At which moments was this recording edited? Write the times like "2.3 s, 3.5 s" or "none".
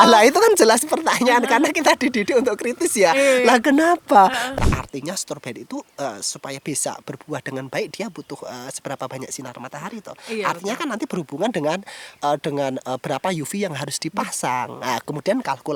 4.4 s